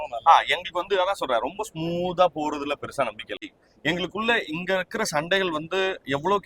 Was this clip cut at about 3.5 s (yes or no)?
yes